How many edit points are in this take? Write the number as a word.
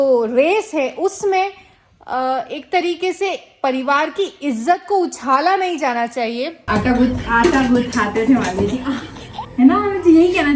one